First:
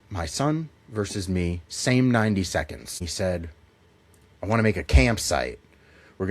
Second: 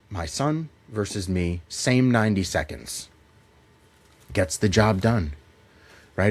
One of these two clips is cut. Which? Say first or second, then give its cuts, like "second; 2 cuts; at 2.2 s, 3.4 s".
first; 1 cut; at 3.0 s